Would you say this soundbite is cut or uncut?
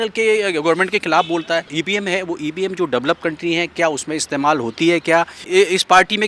cut